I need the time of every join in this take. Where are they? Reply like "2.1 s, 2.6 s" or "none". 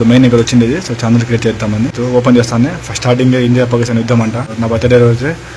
1.9 s, 4.5 s